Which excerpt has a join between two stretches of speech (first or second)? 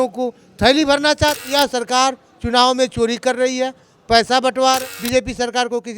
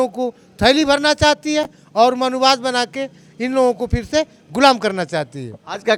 first